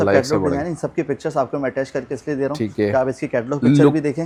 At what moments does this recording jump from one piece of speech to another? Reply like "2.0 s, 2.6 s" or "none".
none